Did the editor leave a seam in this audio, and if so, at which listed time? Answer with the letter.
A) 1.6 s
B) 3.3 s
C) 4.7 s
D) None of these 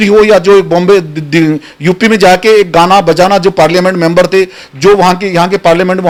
D